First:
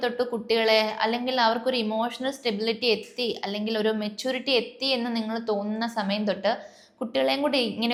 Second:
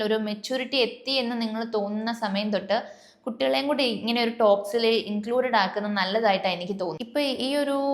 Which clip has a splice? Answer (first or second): second